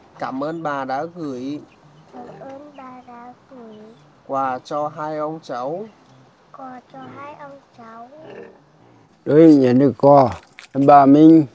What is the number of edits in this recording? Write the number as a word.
one